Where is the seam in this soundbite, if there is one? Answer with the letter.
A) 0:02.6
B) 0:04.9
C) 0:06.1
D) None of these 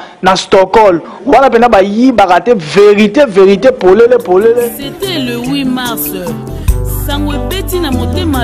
B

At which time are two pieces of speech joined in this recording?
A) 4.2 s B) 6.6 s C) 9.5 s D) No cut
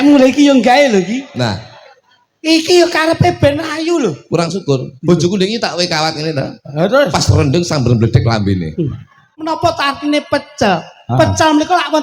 C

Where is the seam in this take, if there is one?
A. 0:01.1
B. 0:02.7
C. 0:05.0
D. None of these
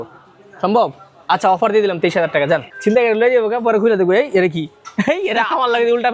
B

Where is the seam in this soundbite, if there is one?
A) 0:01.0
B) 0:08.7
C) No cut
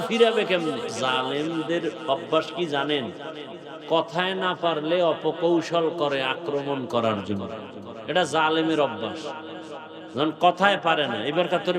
A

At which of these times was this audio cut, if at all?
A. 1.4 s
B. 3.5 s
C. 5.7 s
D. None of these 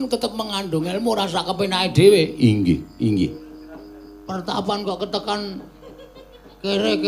B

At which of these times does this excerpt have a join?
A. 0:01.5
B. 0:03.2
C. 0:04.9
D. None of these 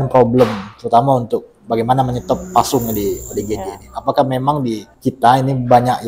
C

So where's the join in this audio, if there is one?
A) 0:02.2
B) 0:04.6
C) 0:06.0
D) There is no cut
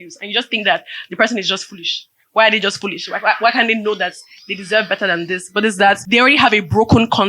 C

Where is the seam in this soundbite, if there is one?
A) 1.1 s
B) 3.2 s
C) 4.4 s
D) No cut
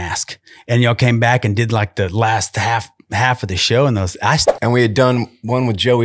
C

